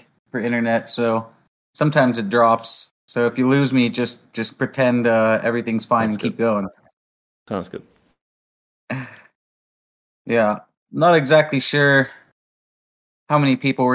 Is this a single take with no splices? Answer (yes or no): yes